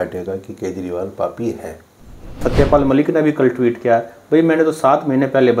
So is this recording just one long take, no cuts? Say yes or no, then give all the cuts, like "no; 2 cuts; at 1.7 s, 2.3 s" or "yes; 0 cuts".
no; 1 cut; at 2.4 s